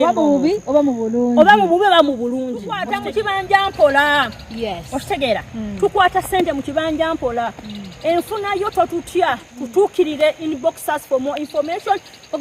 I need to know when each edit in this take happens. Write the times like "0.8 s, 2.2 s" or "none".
2.8 s